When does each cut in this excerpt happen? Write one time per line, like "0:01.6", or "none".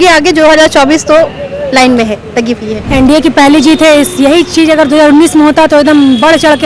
0:02.8

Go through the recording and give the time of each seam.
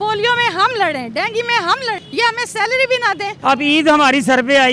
0:02.0
0:03.3

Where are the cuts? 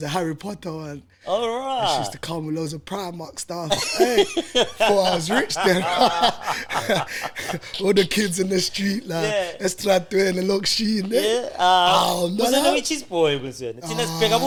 none

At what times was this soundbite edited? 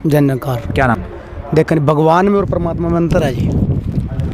0:00.9

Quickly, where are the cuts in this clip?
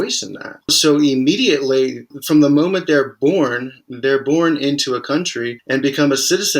0:00.8
0:02.1
0:05.6

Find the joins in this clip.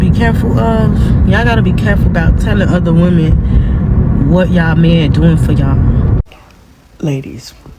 0:06.2

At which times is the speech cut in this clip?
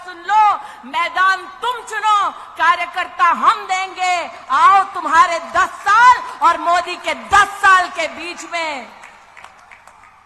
none

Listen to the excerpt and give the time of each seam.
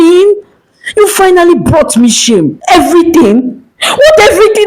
0:02.6

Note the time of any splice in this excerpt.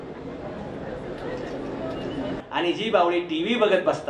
0:02.4

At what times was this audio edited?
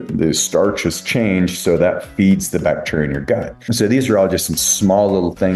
0:03.6

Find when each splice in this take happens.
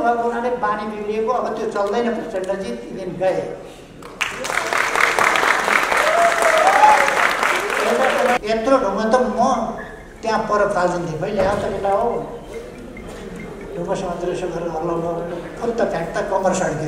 0:08.4

